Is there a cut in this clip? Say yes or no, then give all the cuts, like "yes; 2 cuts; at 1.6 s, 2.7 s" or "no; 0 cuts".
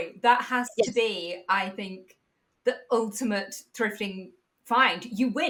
no; 0 cuts